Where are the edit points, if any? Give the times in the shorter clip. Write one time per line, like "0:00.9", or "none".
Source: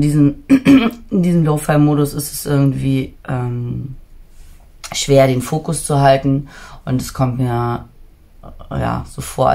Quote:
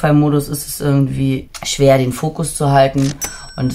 0:01.5